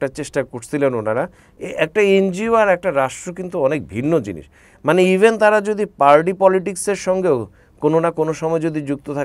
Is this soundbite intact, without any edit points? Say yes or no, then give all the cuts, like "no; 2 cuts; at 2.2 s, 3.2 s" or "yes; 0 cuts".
no; 1 cut; at 1.4 s